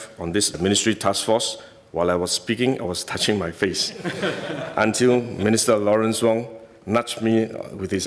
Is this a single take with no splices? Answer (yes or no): yes